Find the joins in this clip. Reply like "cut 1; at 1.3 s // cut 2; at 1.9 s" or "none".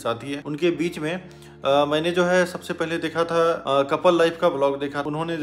none